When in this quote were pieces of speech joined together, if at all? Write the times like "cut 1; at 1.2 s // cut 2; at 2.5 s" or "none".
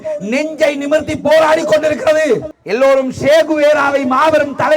cut 1; at 2.6 s